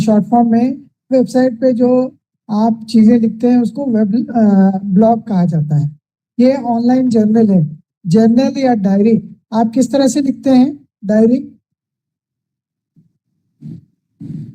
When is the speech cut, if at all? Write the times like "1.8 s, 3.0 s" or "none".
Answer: none